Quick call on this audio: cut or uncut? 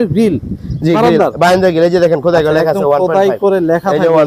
uncut